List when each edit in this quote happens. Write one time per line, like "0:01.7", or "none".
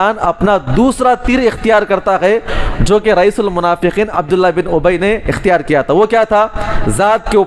none